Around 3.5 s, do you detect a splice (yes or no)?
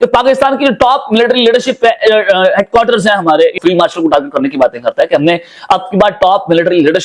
yes